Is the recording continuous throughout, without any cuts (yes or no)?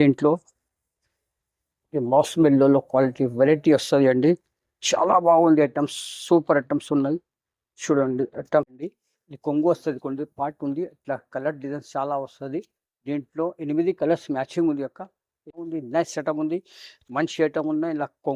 no